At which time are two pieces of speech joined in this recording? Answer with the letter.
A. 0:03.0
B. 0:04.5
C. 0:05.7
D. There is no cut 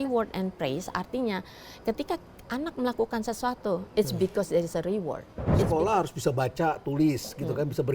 C